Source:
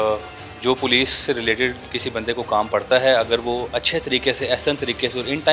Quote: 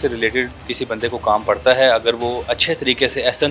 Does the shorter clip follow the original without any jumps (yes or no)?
yes